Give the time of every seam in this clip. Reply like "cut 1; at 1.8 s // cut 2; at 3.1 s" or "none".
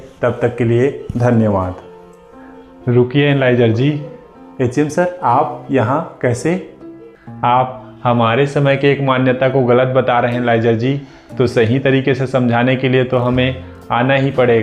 none

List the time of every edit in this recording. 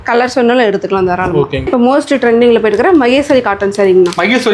cut 1; at 1.7 s

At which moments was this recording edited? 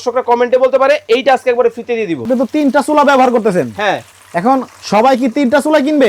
cut 1; at 2.3 s

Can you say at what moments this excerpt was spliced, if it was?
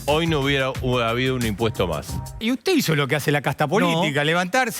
cut 1; at 2.4 s

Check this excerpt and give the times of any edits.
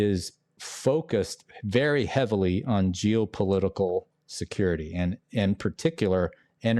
none

